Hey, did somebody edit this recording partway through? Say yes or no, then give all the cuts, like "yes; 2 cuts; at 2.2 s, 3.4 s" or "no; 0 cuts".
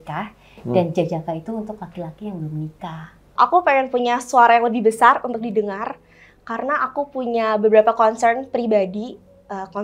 yes; 1 cut; at 3.3 s